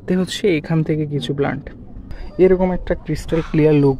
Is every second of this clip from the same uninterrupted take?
no; 1 cut; at 2.2 s

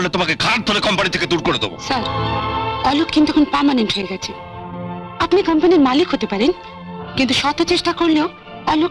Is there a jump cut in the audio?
no; 0 cuts

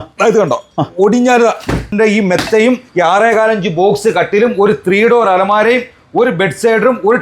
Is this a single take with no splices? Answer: no; 2 cuts; at 1.9 s, 2.9 s

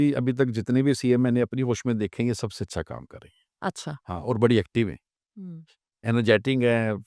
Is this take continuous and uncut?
yes; 0 cuts

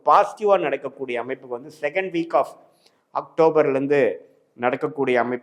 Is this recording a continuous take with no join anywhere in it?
yes; 0 cuts

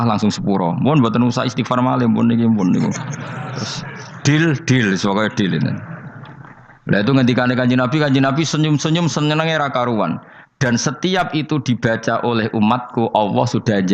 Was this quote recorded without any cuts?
yes; 0 cuts

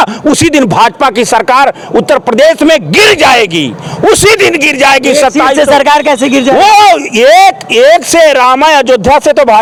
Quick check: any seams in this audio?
no; 0 cuts

